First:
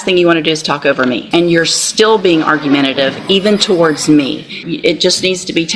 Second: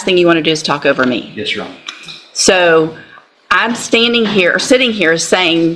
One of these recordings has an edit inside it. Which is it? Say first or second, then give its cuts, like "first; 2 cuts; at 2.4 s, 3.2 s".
first; 2 cuts; at 1.3 s, 4.6 s